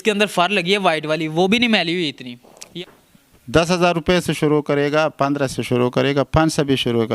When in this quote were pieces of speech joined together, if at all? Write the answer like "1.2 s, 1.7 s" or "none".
2.5 s